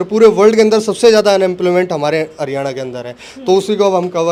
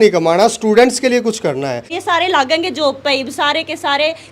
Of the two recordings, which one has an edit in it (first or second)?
second